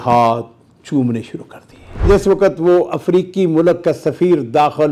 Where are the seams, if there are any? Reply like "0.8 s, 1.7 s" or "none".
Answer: 2.1 s